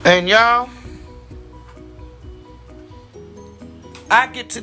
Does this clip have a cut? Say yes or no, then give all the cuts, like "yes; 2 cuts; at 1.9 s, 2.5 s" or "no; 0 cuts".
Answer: yes; 2 cuts; at 1.0 s, 3.5 s